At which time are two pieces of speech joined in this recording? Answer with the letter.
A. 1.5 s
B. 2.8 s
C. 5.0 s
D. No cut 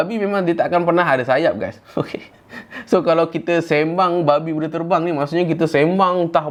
D